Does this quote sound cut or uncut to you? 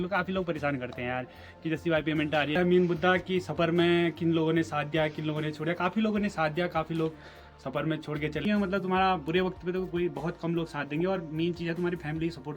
cut